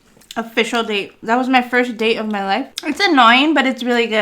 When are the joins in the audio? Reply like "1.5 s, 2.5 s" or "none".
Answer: 2.7 s